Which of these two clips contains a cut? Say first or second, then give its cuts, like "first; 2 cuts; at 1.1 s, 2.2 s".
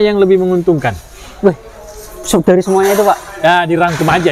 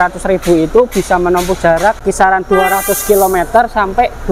second; 1 cut; at 2.0 s